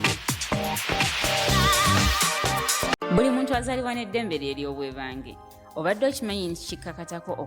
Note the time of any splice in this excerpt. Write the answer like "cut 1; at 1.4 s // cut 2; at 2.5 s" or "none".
cut 1; at 3.0 s